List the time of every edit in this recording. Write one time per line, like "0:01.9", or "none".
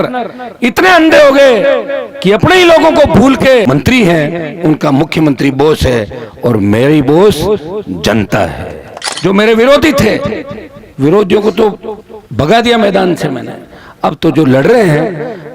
0:03.7
0:09.0